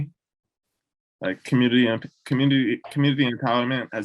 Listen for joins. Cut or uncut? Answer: uncut